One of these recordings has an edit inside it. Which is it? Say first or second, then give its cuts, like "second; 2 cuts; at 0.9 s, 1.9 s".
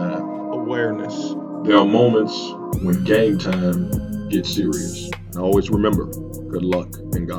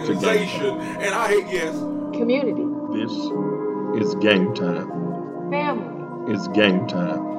second; 1 cut; at 1.7 s